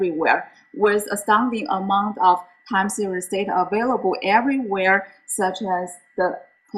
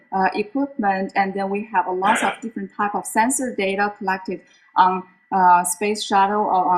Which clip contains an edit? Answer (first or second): first